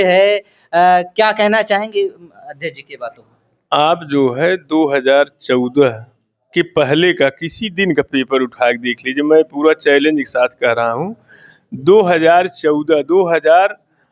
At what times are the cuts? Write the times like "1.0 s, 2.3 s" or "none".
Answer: none